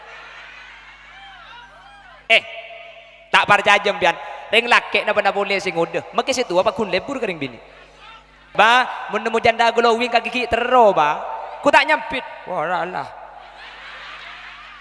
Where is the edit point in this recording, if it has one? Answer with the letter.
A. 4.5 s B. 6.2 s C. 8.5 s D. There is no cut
C